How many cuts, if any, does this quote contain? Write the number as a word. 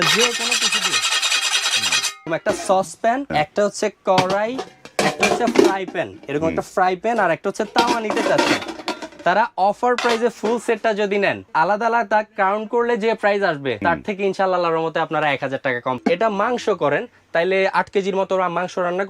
five